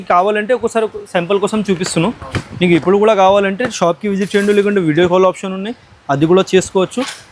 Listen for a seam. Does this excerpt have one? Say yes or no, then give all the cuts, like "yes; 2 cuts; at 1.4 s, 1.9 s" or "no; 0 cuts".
no; 0 cuts